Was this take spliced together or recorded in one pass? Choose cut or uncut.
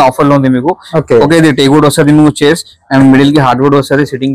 uncut